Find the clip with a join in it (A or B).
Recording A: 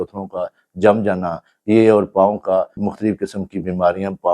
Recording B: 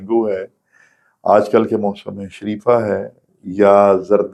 A